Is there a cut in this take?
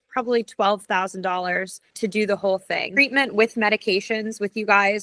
yes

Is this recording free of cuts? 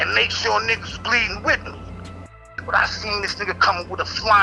no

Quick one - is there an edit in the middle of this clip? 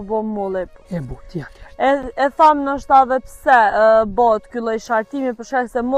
no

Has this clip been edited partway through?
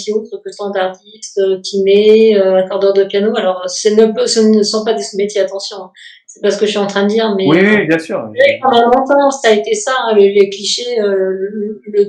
no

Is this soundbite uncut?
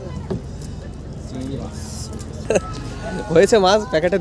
no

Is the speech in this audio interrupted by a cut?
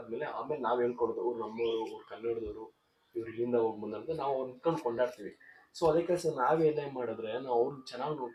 no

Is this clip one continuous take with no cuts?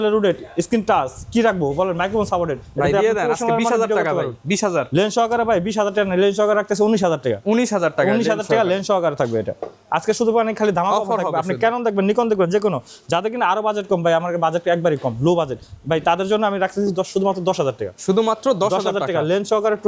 yes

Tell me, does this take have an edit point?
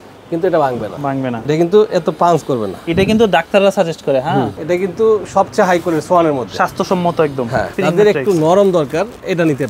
yes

